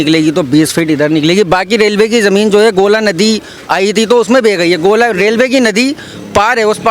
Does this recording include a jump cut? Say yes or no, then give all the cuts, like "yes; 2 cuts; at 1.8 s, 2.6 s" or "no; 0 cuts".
no; 0 cuts